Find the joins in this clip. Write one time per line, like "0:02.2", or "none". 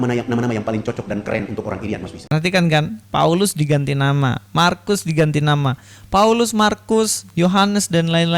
none